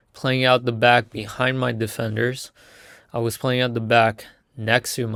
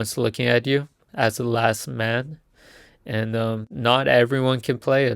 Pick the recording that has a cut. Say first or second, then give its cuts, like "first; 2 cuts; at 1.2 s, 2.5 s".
second; 2 cuts; at 1.0 s, 3.7 s